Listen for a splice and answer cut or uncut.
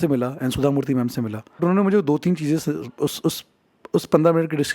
cut